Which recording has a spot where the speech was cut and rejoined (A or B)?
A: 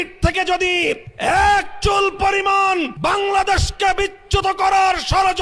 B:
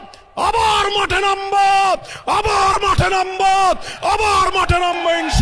A